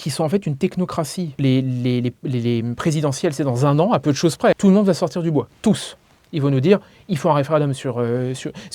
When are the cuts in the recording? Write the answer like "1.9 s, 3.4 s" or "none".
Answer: 1.4 s, 4.5 s